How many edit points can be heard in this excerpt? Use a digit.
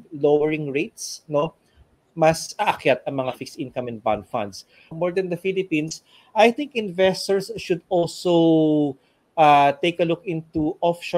1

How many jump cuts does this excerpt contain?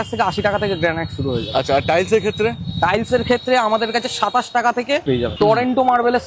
1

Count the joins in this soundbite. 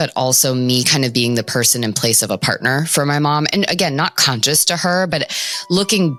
0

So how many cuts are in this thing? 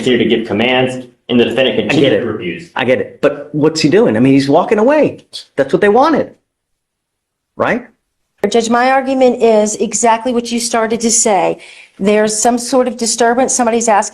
1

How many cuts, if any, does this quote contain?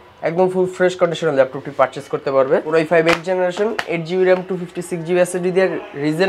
1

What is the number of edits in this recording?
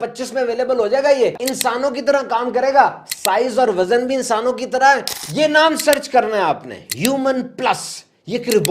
2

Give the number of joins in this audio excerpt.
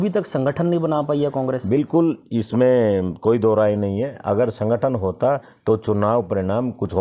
0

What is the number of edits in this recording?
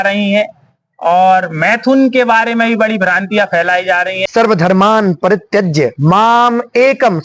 1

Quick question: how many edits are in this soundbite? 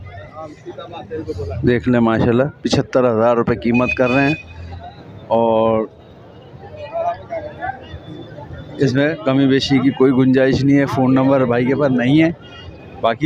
0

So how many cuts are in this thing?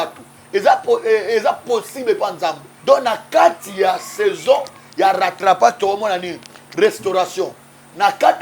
1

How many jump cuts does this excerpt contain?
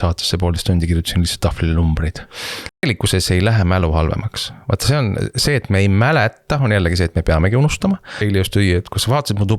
2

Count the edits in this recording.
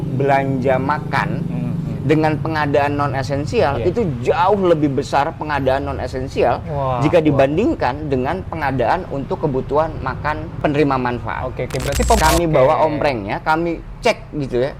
1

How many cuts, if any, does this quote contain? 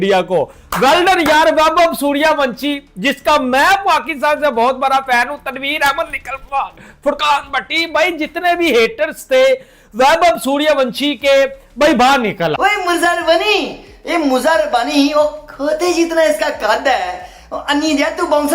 1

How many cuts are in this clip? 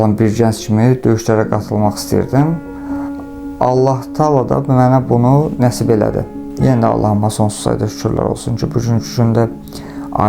1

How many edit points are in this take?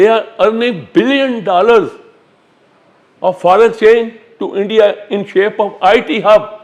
0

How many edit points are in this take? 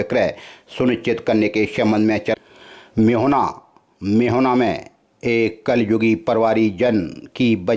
1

